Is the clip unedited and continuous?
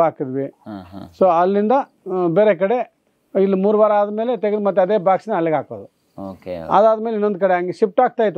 yes; 0 cuts

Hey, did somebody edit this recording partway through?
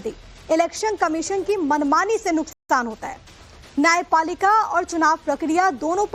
no; 0 cuts

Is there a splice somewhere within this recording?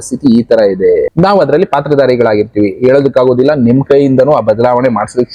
yes; 1 cut; at 1.1 s

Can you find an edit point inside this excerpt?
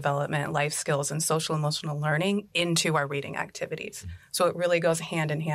no; 0 cuts

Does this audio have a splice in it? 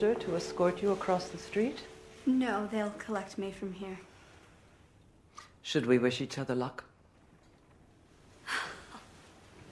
no; 0 cuts

